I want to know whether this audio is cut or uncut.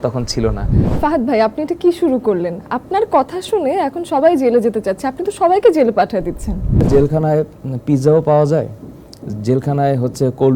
cut